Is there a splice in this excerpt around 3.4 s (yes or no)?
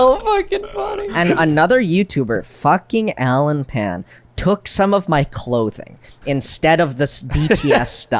no